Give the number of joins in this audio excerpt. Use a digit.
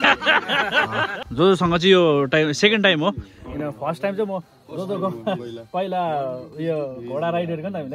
1